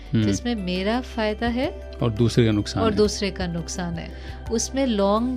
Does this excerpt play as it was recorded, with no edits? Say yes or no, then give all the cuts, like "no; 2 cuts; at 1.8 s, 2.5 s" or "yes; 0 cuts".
no; 1 cut; at 1.8 s